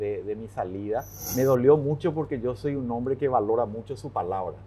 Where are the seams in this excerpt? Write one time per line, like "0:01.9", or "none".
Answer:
0:01.2